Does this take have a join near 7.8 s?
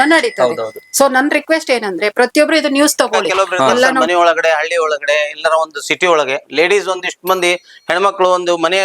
no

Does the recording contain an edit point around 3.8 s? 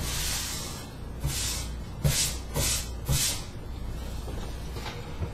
no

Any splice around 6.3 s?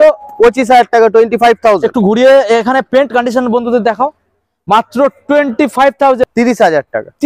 yes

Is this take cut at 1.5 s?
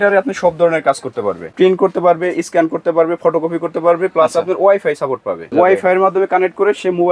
yes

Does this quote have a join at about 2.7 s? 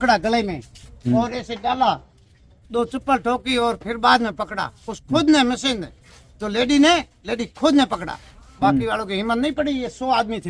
no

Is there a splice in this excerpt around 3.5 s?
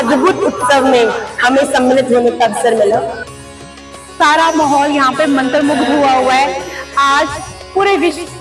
yes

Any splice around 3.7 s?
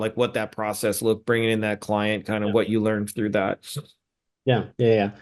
no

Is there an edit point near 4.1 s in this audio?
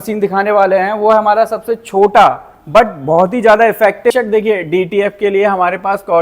yes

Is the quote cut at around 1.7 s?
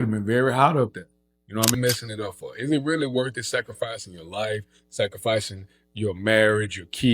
yes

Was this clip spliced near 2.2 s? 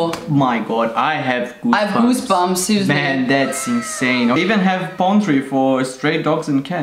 no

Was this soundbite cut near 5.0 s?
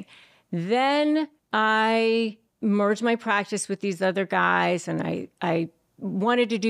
no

